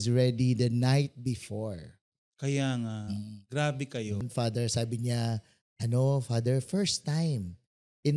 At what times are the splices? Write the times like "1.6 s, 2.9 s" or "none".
4.2 s